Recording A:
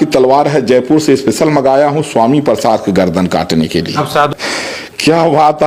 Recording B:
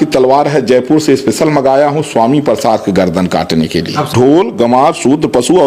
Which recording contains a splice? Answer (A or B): B